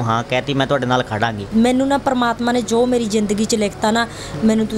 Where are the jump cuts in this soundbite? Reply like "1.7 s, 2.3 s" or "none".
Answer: 1.4 s